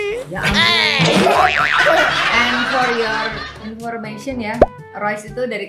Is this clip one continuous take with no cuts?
yes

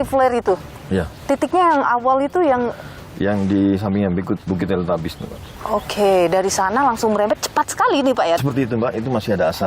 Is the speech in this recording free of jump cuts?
no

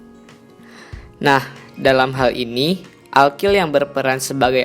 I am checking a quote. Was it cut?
yes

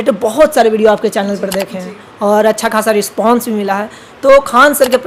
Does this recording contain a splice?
no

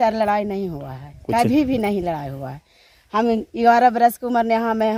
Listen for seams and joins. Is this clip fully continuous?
yes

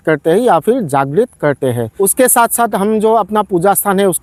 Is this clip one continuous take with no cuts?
yes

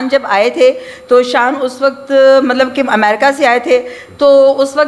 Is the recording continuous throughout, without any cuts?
yes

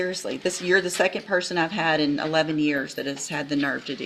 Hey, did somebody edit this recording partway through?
no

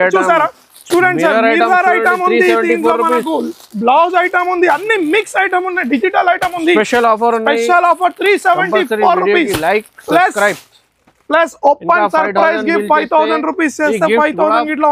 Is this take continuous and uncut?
yes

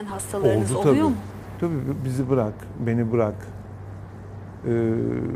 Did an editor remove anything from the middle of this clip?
no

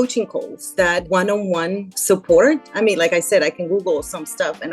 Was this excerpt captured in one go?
no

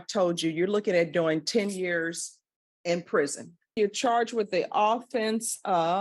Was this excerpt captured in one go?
no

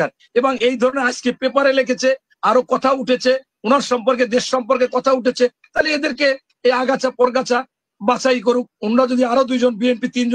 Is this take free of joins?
yes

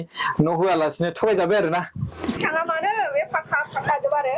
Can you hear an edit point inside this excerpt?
yes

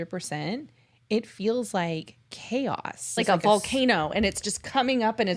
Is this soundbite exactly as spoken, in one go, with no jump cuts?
no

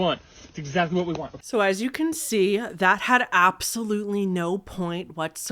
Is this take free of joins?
no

